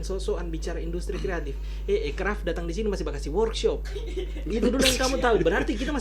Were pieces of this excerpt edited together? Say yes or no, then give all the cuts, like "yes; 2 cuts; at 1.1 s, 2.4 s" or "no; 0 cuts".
no; 0 cuts